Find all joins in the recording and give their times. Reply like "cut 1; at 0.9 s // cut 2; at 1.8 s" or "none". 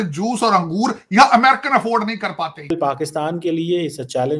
cut 1; at 2.7 s